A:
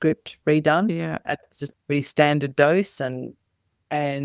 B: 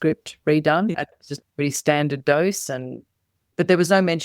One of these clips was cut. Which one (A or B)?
B